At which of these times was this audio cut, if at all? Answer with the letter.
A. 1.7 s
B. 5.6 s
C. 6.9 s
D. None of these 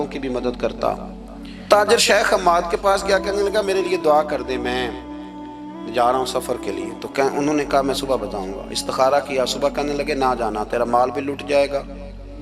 A